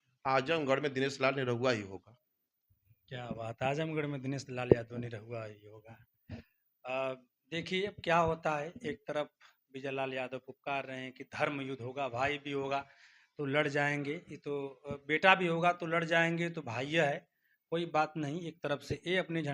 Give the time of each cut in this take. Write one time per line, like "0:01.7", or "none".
none